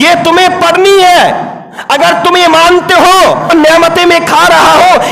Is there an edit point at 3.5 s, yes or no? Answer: yes